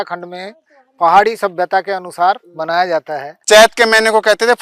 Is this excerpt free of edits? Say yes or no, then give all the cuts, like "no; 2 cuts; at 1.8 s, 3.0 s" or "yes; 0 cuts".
no; 1 cut; at 3.3 s